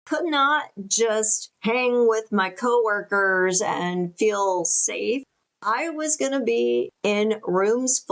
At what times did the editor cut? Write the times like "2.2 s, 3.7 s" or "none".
none